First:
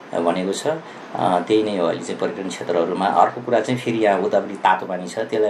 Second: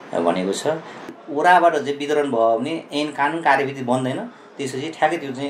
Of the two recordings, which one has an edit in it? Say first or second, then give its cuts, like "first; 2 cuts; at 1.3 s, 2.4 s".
second; 1 cut; at 1.1 s